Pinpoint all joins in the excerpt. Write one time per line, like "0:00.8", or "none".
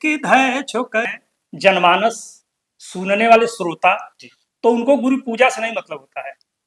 0:01.2